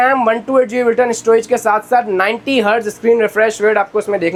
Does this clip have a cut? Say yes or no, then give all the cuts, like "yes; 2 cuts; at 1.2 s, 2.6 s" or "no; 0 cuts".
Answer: no; 0 cuts